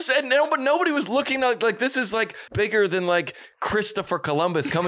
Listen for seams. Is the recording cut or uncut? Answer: cut